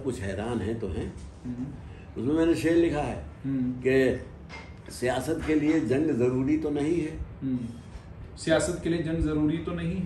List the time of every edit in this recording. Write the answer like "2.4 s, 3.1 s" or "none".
none